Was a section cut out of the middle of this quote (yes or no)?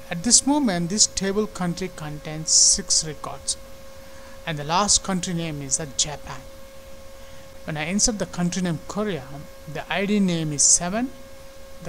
yes